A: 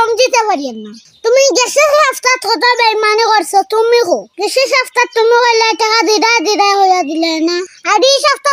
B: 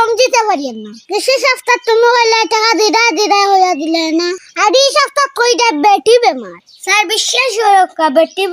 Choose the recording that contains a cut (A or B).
B